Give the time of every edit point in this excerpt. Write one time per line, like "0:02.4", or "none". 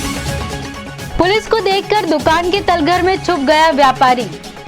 0:01.0